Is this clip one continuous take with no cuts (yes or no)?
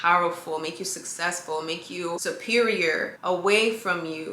no